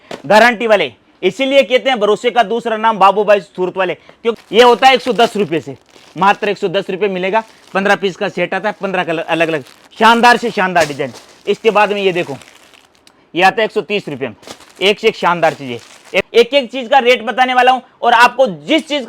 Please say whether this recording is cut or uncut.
cut